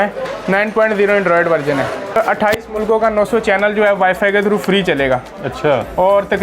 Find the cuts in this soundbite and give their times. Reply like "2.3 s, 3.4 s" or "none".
2.2 s